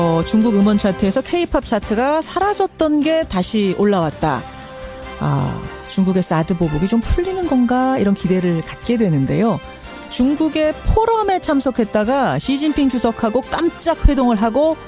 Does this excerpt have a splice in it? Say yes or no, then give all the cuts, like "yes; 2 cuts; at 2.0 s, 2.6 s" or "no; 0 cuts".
no; 0 cuts